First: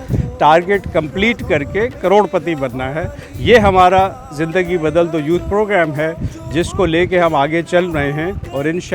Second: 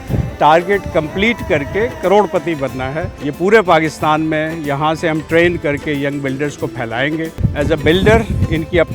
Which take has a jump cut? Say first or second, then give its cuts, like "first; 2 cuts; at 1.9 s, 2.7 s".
second; 2 cuts; at 3.2 s, 7.4 s